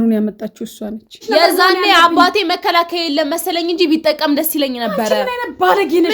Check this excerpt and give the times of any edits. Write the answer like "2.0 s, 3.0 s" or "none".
1.2 s